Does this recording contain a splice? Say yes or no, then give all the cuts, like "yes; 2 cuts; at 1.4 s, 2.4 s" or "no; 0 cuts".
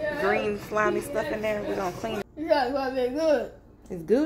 yes; 1 cut; at 2.2 s